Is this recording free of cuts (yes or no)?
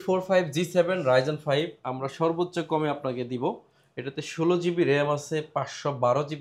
yes